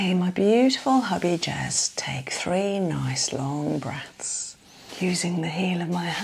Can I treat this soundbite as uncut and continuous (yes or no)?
no